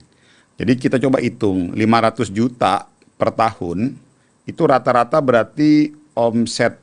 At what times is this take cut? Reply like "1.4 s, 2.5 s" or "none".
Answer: none